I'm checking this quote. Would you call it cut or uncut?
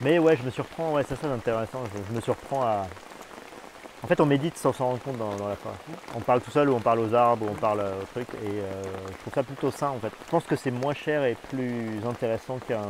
uncut